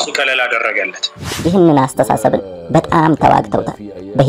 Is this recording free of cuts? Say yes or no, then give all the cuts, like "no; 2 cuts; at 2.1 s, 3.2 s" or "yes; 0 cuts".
no; 1 cut; at 1.3 s